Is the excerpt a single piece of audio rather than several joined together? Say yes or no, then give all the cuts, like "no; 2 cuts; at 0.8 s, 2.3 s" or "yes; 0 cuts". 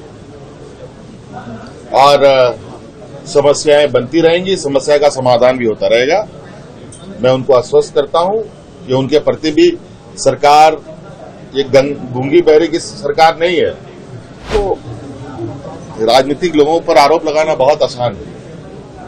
no; 1 cut; at 14.5 s